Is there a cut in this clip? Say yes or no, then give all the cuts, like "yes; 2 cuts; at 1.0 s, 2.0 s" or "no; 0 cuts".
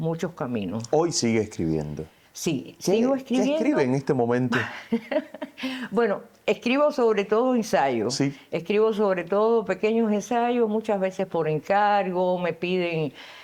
no; 0 cuts